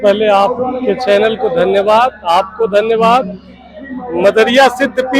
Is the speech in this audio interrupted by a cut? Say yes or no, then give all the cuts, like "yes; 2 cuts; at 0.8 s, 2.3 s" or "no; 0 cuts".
no; 0 cuts